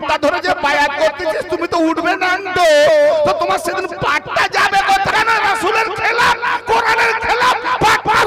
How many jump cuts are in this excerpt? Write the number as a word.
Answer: one